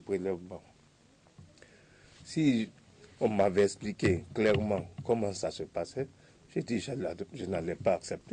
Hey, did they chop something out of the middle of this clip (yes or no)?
no